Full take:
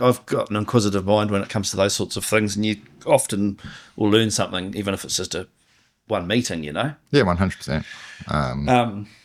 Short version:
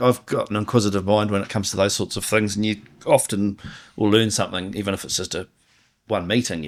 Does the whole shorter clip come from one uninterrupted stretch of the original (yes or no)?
yes